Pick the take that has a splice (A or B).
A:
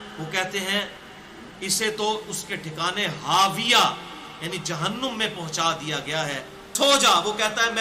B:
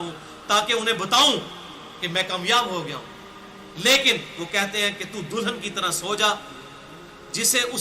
A